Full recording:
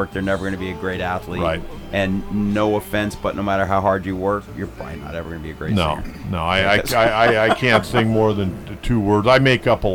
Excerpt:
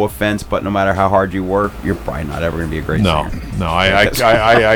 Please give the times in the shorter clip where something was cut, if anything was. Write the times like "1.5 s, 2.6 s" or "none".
none